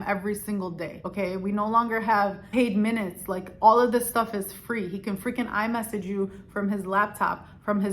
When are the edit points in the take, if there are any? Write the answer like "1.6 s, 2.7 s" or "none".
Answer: 1.0 s